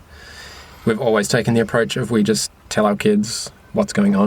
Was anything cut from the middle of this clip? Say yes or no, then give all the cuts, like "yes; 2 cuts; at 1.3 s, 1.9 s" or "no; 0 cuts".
yes; 1 cut; at 2.6 s